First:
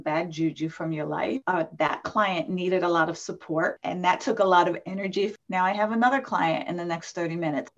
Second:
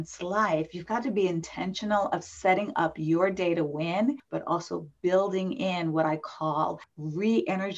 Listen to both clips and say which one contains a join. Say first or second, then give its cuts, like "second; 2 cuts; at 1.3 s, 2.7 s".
first; 3 cuts; at 1.4 s, 3.8 s, 5.3 s